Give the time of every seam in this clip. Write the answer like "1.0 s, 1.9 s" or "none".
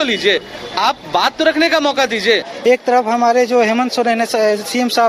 2.5 s

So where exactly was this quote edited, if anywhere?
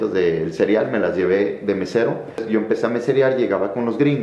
2.4 s

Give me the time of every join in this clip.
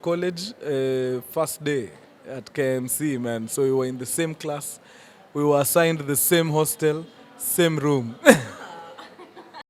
none

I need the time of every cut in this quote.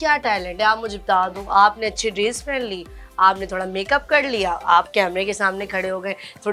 none

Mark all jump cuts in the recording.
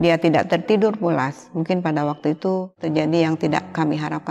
2.8 s

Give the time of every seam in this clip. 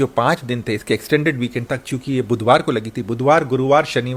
none

